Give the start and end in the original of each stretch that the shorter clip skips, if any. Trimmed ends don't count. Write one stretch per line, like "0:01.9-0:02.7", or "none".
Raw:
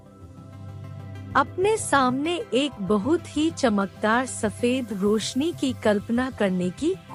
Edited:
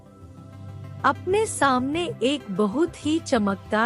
0:01.0-0:01.3